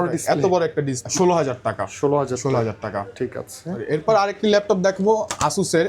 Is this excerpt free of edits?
no; 1 cut; at 1.0 s

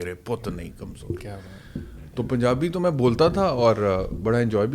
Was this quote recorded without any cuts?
yes; 0 cuts

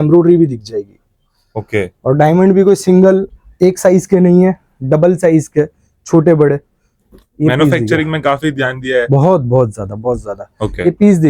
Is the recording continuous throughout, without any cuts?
yes; 0 cuts

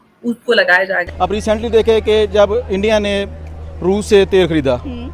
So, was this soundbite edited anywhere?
yes; 1 cut; at 1.0 s

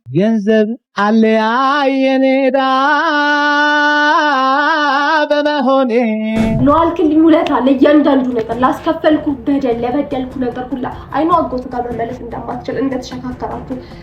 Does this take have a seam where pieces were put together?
yes; 1 cut; at 6.6 s

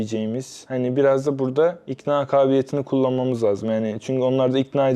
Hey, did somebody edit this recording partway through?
no; 0 cuts

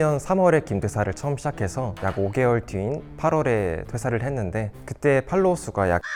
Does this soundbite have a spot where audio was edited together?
no; 0 cuts

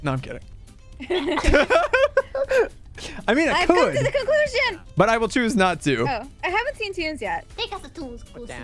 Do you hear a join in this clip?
yes; 2 cuts; at 6.3 s, 7.5 s

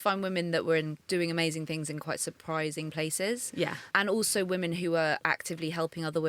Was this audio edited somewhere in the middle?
yes; 2 cuts; at 1.0 s, 3.9 s

